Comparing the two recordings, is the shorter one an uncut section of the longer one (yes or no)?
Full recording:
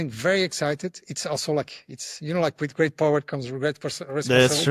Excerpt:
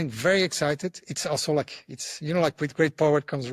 yes